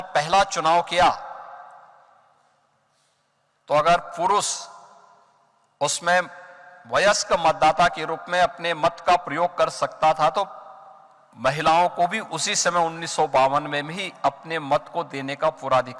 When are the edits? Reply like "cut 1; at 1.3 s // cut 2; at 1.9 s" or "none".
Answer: none